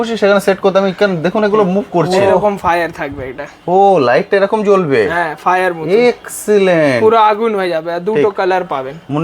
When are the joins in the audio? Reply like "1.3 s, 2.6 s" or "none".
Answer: 2.1 s

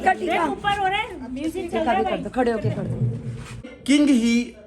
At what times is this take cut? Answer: 3.7 s

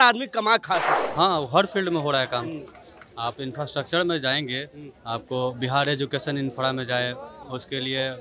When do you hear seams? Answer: 1.0 s

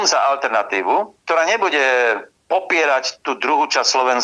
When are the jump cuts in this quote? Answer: none

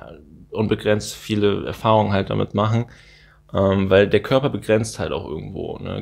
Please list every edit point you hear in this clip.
none

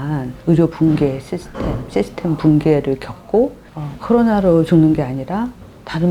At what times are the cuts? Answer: 3.7 s

